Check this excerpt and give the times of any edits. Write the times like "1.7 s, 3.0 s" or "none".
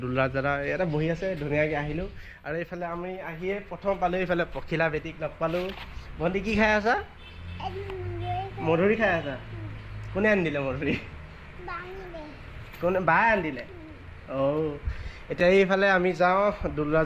none

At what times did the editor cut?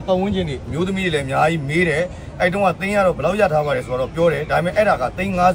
none

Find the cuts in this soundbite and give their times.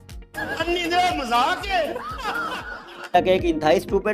3.1 s

